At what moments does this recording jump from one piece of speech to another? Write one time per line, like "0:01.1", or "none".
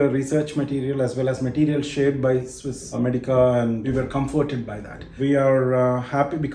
0:02.9
0:03.9
0:05.2